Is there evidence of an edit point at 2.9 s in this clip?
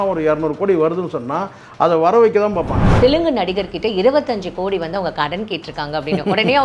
yes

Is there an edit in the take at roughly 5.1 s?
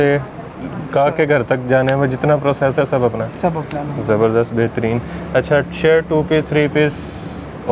no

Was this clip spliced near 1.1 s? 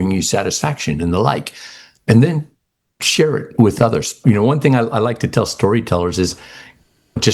no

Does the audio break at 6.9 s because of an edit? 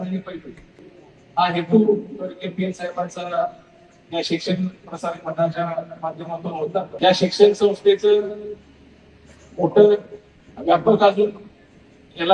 yes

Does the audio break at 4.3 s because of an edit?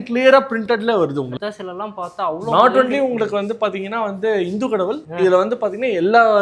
no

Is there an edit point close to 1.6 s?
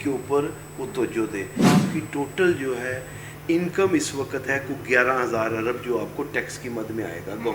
yes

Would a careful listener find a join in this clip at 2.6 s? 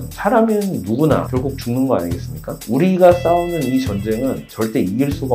yes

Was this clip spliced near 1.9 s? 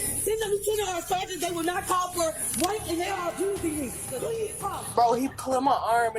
no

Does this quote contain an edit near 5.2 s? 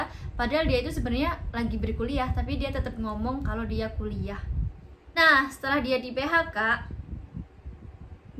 yes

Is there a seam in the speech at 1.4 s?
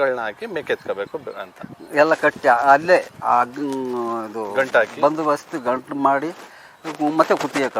no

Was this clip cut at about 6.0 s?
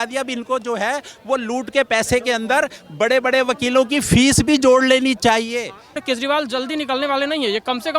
yes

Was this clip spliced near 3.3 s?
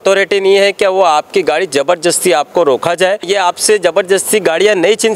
yes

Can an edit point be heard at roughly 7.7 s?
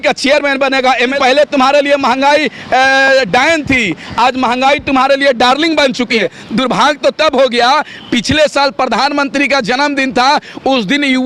no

